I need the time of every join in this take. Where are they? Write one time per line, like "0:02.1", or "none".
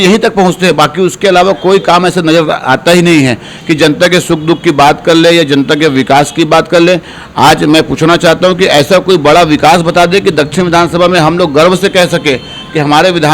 none